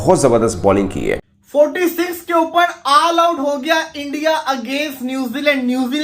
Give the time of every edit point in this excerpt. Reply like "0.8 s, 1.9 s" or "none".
1.2 s